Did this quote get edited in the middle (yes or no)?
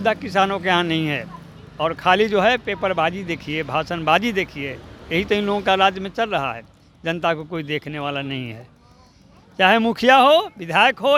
no